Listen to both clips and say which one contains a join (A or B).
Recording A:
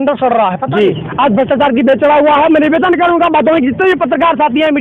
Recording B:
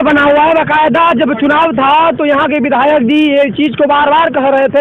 A